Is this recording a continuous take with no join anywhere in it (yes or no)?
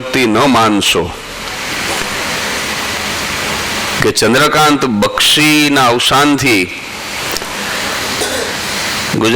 yes